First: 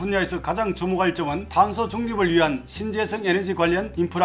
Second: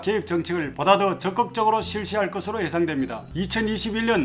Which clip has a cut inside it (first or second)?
second